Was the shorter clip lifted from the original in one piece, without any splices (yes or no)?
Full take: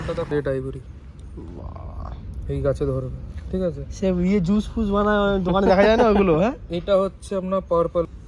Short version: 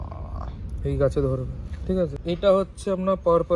no